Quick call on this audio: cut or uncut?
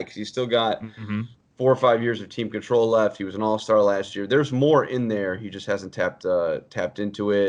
uncut